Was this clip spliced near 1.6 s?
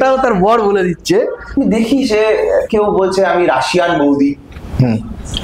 yes; 1 cut; at 1.6 s

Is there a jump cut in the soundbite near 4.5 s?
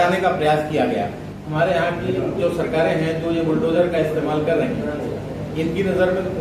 no; 1 cut; at 1.4 s

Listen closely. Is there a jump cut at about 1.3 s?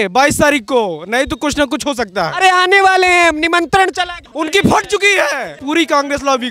no; 2 cuts; at 4.3 s, 5.5 s

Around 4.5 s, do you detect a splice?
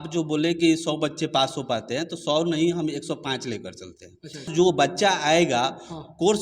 yes; 1 cut; at 4.5 s

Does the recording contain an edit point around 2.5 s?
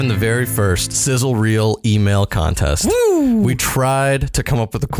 no; 1 cut; at 0.9 s

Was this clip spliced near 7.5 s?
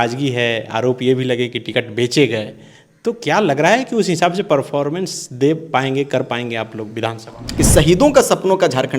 yes; 1 cut; at 7.5 s

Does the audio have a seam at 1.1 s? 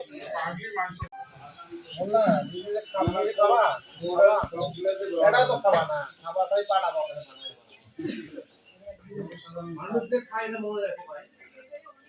no; 0 cuts

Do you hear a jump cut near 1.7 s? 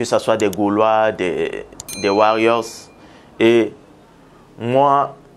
no; 0 cuts

